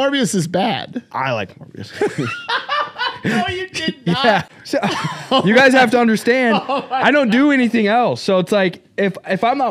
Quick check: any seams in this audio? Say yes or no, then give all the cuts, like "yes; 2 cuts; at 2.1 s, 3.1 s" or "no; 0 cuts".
yes; 1 cut; at 4.5 s